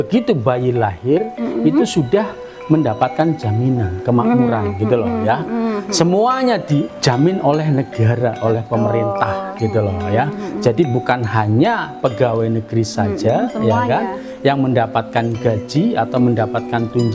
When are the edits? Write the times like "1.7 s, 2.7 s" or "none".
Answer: 6.9 s